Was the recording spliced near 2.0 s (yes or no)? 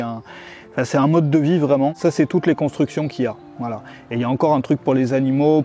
yes